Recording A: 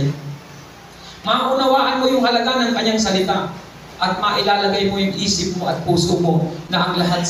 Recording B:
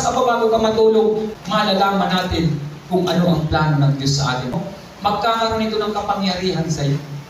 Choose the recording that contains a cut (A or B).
B